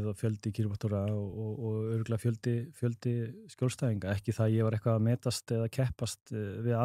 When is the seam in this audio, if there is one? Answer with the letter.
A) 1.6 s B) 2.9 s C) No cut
C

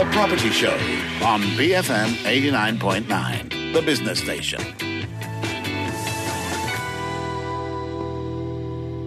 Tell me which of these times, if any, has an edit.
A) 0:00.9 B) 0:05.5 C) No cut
C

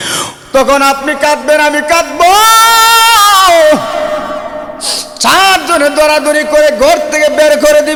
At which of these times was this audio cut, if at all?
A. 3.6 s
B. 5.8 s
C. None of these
C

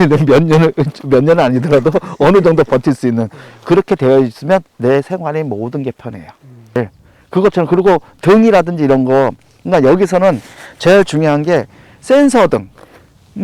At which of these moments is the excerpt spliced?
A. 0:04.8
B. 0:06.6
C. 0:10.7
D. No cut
B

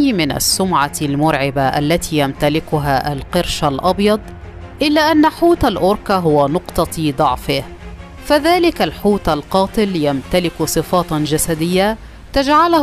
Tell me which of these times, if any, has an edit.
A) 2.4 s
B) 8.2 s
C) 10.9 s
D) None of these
D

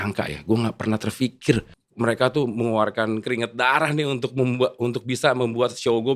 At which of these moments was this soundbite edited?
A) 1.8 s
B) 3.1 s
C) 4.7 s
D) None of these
A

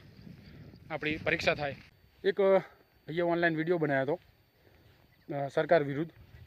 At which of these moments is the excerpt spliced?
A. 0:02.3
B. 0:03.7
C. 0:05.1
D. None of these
A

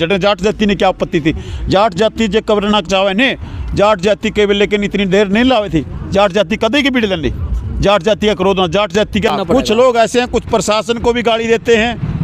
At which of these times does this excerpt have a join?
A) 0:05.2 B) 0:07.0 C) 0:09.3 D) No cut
C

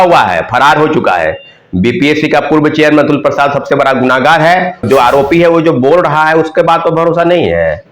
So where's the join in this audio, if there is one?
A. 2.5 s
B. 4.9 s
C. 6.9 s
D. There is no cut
B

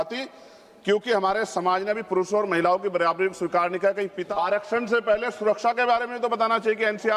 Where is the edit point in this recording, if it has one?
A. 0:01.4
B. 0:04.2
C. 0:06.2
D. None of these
B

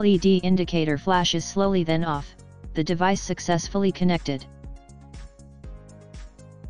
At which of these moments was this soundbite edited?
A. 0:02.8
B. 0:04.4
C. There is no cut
B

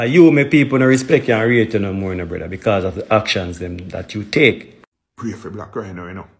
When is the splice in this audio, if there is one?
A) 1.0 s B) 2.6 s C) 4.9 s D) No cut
C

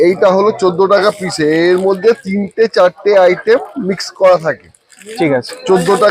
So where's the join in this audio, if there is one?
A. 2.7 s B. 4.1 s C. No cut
C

